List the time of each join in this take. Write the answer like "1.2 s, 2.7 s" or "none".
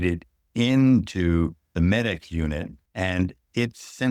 2.8 s